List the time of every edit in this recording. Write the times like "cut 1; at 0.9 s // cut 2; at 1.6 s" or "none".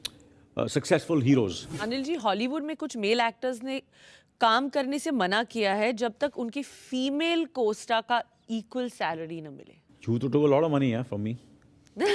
cut 1; at 1.8 s // cut 2; at 9.8 s